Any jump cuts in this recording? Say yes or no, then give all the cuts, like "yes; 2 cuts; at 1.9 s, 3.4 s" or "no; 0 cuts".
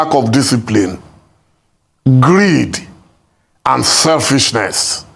no; 0 cuts